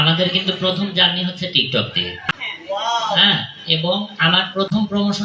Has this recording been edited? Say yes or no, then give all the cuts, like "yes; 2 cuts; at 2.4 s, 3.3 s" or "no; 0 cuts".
no; 0 cuts